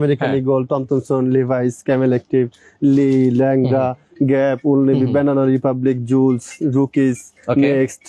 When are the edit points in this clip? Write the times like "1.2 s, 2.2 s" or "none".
none